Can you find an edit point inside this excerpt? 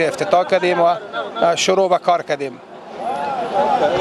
no; 0 cuts

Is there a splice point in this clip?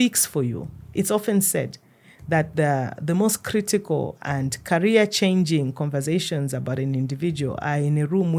no; 0 cuts

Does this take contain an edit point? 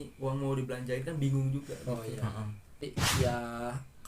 yes; 1 cut; at 3.0 s

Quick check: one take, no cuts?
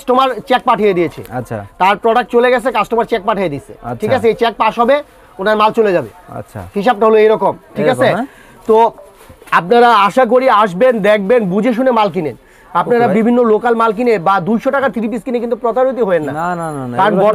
yes; 0 cuts

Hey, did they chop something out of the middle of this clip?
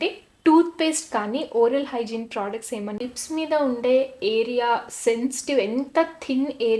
yes; 1 cut; at 3.0 s

